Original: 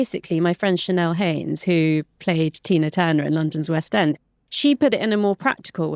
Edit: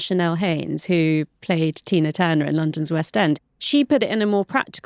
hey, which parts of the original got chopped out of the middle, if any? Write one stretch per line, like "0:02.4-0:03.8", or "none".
0:04.3-0:04.4